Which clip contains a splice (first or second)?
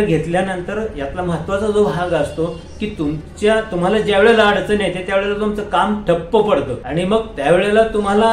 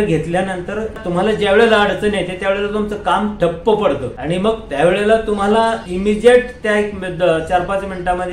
second